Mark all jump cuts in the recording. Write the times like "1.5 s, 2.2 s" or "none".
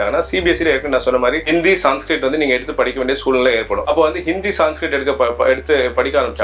none